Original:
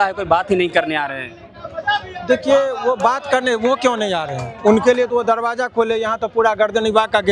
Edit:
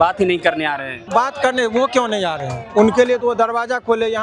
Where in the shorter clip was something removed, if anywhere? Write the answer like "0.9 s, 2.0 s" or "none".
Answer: 1.1 s